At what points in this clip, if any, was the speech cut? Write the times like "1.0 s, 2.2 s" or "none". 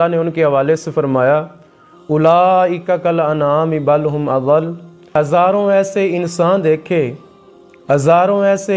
5.1 s